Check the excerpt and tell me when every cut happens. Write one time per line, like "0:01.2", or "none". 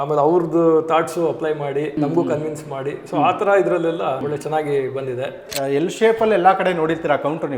0:02.0
0:04.2
0:05.5

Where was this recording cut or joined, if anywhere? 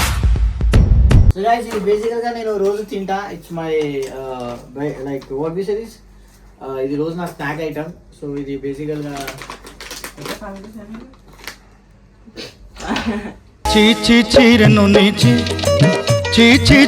0:01.3

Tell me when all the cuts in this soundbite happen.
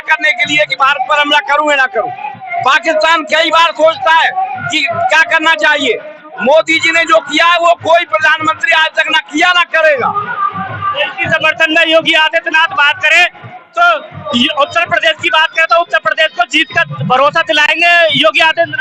none

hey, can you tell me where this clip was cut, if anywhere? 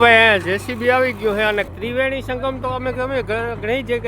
0:01.7

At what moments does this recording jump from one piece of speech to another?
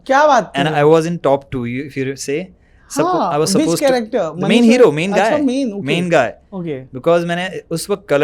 none

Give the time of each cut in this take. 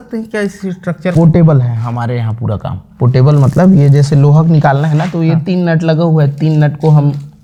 none

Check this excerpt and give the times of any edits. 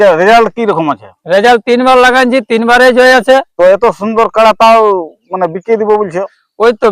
0:03.5

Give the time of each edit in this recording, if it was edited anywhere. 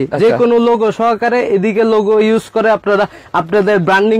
none

